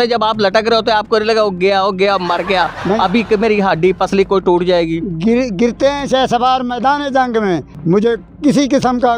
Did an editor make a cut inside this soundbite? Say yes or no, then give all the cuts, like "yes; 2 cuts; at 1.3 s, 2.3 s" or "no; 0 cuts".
no; 0 cuts